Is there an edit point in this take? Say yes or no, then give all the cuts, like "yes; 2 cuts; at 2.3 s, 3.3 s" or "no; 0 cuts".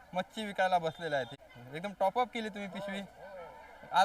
yes; 1 cut; at 1.3 s